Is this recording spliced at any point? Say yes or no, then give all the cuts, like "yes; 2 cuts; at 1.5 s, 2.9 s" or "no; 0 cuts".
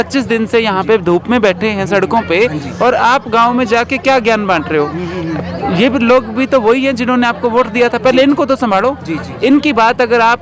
no; 0 cuts